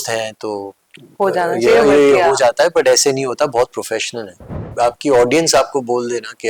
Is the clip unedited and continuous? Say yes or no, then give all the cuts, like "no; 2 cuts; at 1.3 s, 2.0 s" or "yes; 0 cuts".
no; 1 cut; at 4.7 s